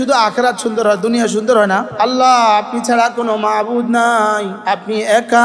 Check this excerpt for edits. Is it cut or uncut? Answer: cut